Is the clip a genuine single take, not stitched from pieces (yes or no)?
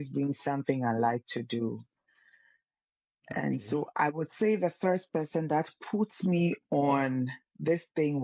yes